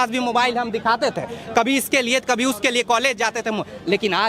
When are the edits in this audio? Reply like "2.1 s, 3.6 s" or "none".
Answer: none